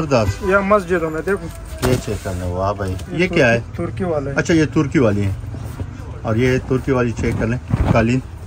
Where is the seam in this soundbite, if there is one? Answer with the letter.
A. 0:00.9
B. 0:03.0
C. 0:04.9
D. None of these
B